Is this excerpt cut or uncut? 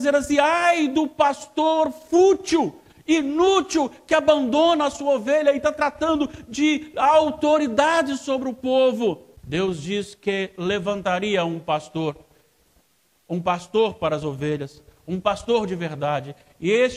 uncut